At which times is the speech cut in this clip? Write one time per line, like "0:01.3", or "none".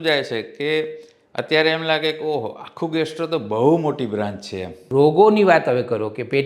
0:04.8

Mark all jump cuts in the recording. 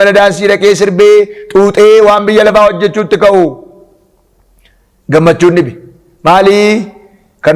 none

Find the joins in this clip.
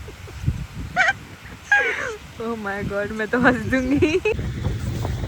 0:04.3

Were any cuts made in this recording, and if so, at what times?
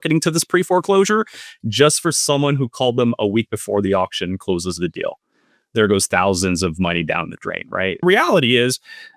0:08.0

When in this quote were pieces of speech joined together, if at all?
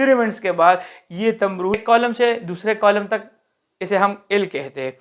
0:01.8

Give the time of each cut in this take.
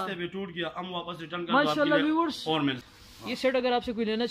0:02.9

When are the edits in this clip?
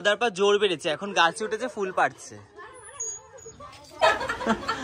0:03.9

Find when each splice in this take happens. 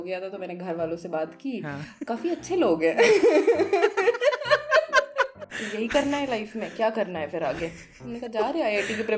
0:05.4

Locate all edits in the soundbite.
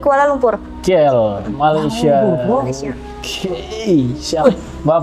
none

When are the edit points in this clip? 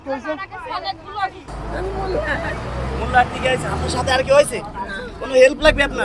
0:01.5

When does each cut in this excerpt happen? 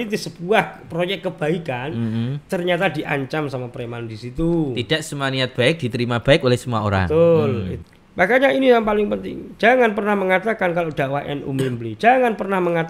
0:07.7

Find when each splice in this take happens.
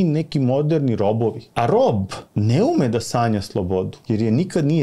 0:01.4
0:02.2
0:04.0

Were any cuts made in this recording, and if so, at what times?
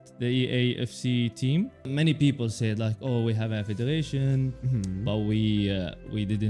0:01.9

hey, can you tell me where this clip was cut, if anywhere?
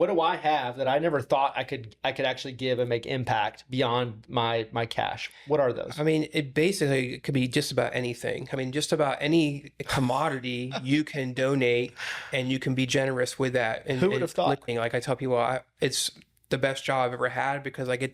0:08.6
0:14.7

